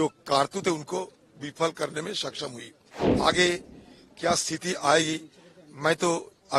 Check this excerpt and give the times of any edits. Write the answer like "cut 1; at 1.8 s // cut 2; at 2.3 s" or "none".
cut 1; at 3.1 s